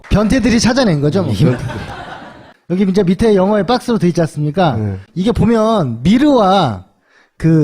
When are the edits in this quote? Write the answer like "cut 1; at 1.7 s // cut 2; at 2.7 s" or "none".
cut 1; at 3.6 s

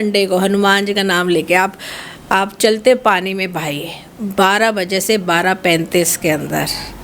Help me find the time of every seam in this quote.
none

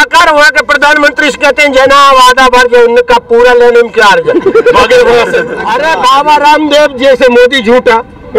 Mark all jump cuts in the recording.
cut 1; at 5.6 s

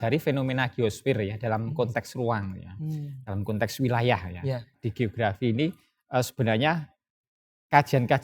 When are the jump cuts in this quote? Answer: cut 1; at 4.8 s

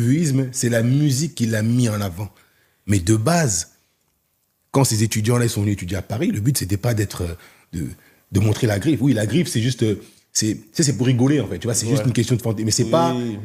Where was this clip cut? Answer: none

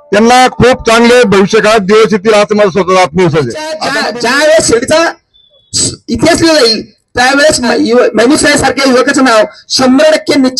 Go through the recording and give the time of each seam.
cut 1; at 3.8 s // cut 2; at 7.7 s

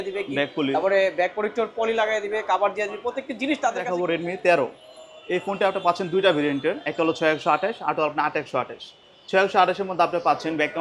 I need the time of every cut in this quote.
cut 1; at 3.8 s

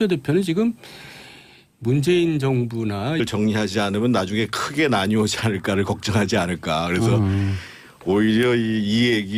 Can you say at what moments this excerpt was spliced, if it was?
none

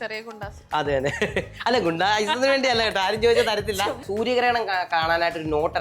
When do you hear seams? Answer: cut 1; at 4.1 s

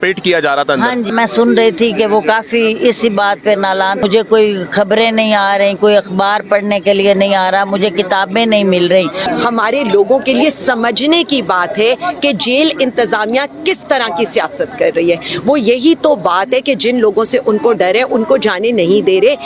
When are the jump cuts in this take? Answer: cut 1; at 1.1 s // cut 2; at 4.0 s // cut 3; at 9.2 s

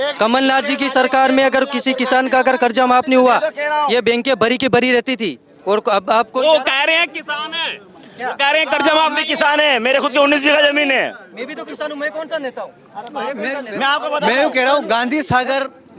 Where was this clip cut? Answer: none

